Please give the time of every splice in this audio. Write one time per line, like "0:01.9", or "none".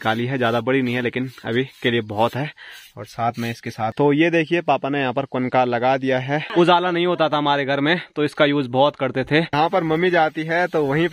0:03.9
0:06.4
0:09.5